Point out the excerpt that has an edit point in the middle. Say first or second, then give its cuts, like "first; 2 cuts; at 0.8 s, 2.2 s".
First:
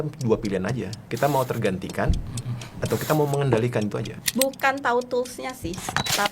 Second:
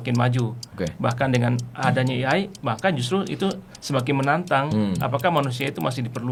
first; 2 cuts; at 1.0 s, 4.1 s